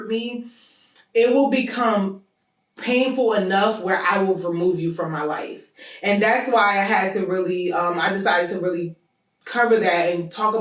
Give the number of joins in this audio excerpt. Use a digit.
0